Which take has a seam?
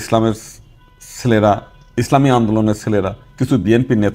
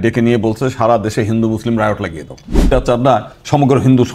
second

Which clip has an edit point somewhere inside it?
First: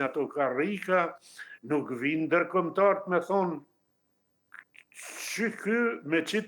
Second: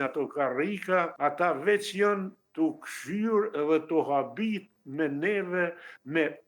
second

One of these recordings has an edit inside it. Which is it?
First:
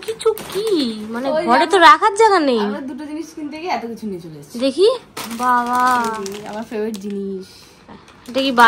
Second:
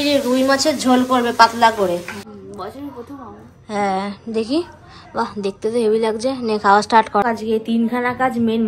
second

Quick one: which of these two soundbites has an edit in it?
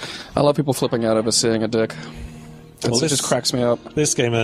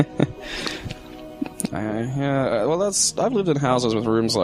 first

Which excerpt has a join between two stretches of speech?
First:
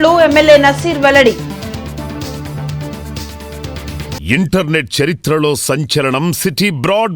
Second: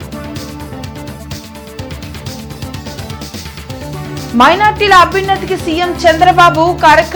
first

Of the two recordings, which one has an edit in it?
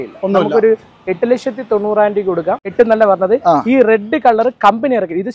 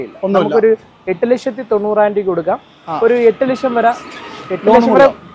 first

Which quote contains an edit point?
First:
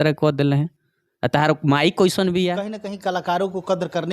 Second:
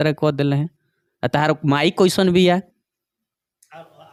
first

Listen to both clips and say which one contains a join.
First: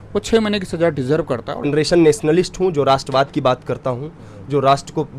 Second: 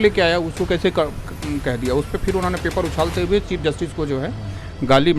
first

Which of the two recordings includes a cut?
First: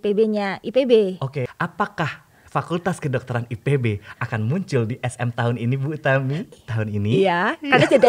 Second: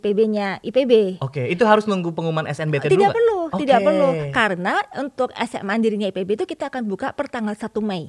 first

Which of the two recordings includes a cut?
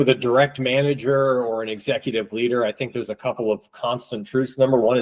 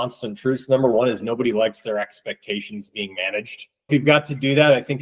second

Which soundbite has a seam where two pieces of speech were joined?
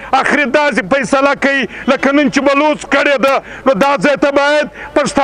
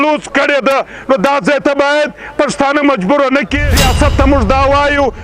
second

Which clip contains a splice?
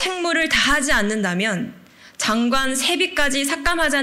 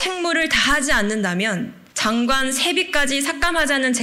second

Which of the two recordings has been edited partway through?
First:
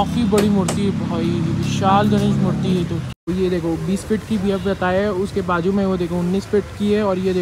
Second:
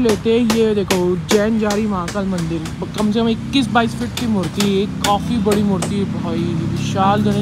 first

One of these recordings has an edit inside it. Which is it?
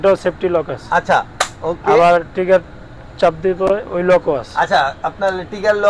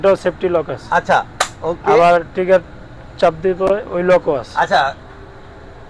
second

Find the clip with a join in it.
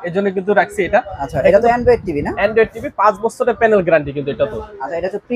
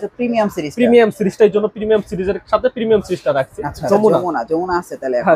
second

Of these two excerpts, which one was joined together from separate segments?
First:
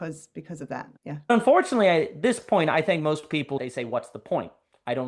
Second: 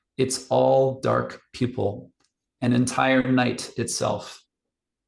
first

